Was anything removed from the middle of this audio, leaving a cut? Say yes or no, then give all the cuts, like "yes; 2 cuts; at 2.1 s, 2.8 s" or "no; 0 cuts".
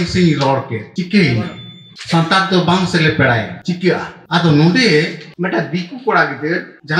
no; 0 cuts